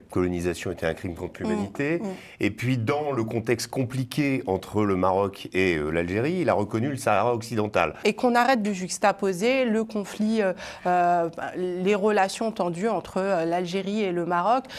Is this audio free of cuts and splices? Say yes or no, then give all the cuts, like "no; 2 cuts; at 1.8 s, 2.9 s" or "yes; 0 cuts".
no; 1 cut; at 8.0 s